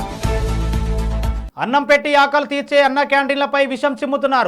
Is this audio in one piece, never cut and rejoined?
no; 1 cut; at 1.2 s

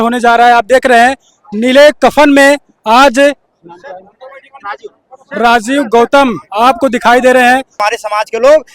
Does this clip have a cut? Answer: yes; 1 cut; at 7.8 s

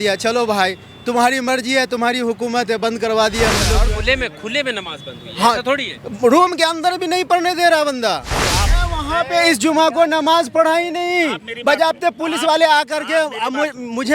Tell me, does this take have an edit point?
yes; 2 cuts; at 3.7 s, 8.7 s

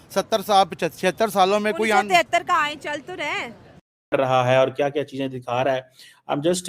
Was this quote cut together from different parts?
yes; 1 cut; at 4.1 s

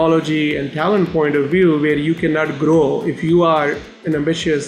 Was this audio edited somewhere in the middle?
no; 0 cuts

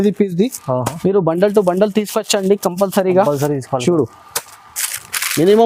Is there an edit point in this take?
no; 0 cuts

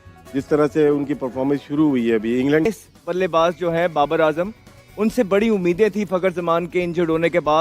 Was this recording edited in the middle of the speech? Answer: yes; 1 cut; at 2.7 s

